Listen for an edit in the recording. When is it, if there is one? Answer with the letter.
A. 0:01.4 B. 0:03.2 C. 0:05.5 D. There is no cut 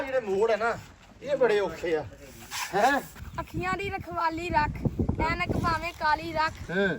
B